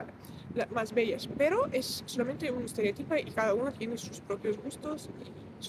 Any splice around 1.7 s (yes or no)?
no